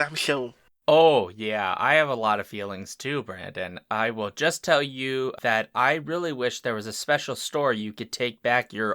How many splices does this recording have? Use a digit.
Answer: 1